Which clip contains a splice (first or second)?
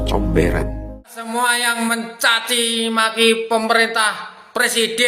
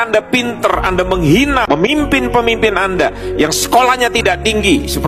first